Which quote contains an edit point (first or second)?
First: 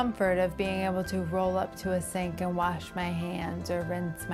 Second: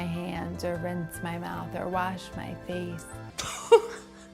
second